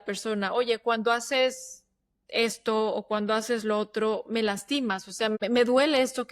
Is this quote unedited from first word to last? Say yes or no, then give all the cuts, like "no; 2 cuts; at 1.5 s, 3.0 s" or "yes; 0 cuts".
no; 1 cut; at 5.4 s